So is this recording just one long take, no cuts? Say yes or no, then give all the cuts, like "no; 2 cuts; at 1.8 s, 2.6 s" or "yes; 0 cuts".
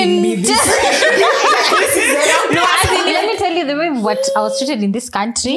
no; 1 cut; at 3.1 s